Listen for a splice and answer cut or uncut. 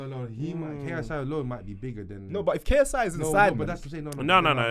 uncut